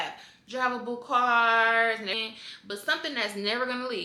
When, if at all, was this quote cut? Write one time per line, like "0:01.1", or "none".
0:02.1